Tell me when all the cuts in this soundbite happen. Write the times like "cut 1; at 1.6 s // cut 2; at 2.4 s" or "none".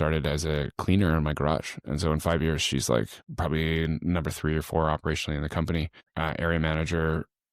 cut 1; at 3.2 s // cut 2; at 6.1 s